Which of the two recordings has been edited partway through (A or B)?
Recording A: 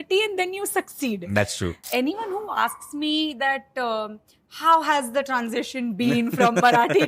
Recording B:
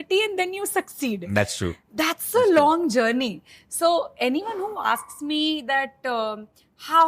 A